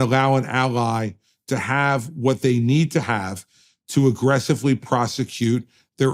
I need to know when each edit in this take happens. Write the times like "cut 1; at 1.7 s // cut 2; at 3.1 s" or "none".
none